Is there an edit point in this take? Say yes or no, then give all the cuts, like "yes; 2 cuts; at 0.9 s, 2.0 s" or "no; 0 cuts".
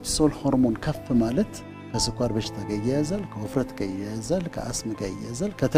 no; 0 cuts